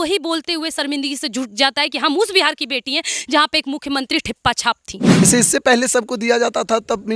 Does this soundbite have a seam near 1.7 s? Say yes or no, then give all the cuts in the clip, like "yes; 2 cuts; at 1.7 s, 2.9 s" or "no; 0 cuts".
no; 1 cut; at 5.2 s